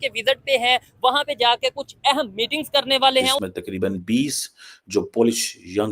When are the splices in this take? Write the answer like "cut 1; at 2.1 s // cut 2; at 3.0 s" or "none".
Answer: cut 1; at 3.4 s